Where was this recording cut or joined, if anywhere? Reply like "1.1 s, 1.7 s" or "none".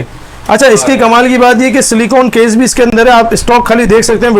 2.9 s